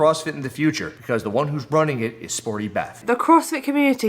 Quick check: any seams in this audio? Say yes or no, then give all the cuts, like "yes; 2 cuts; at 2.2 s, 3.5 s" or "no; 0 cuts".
yes; 1 cut; at 3.0 s